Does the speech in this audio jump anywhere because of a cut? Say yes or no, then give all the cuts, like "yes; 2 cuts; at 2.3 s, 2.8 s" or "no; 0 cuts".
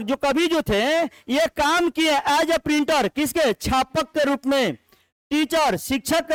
no; 0 cuts